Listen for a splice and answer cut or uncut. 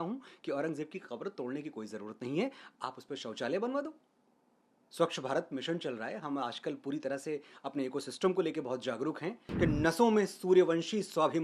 cut